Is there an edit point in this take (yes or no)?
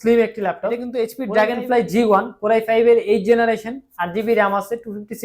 yes